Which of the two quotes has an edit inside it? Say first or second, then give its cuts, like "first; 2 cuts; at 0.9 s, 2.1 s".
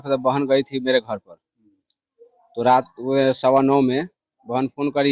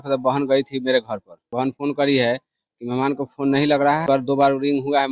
second; 2 cuts; at 1.6 s, 4.0 s